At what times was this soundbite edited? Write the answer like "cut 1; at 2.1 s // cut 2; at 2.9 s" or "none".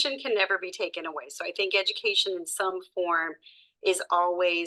none